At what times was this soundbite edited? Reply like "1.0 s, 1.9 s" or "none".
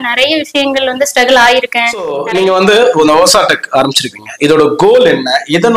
2.2 s